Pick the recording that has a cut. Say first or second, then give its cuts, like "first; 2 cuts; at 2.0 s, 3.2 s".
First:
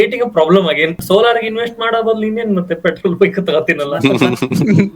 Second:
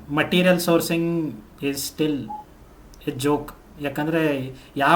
first; 1 cut; at 1.0 s